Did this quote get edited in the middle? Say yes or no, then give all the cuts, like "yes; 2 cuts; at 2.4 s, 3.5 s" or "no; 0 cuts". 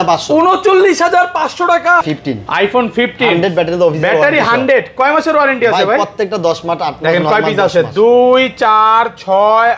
yes; 1 cut; at 2.0 s